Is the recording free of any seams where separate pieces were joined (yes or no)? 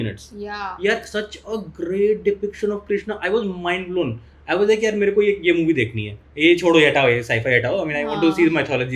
yes